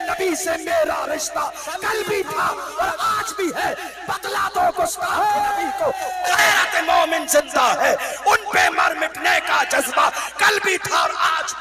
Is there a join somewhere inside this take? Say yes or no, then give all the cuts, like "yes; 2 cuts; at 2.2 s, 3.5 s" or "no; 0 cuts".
no; 0 cuts